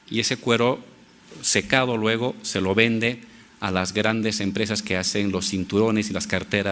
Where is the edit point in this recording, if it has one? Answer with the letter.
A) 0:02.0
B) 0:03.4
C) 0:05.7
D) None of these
C